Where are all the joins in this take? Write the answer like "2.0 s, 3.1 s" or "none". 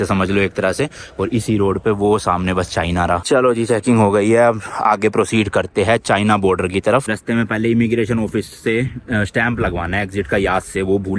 none